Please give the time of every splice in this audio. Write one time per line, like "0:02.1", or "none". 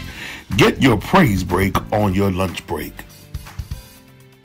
0:03.0